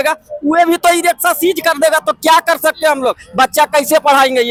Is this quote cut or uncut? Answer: uncut